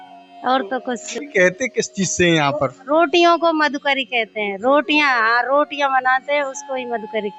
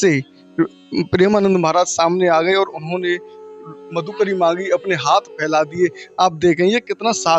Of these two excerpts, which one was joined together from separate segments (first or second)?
first